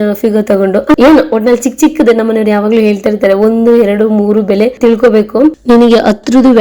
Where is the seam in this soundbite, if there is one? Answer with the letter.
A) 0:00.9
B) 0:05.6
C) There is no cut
A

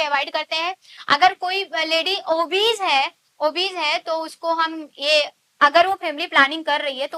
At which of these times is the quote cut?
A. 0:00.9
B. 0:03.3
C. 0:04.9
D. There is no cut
A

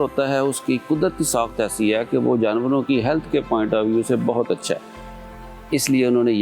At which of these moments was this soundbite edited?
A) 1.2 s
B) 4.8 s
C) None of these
C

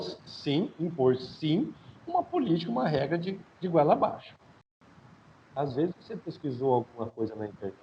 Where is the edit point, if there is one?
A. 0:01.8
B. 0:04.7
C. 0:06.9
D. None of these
B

